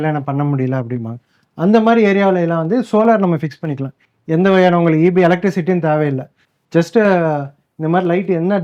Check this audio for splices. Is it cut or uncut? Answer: uncut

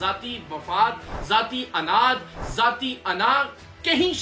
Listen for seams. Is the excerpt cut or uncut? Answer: uncut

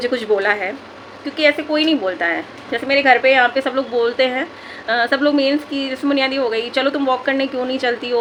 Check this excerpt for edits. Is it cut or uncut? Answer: uncut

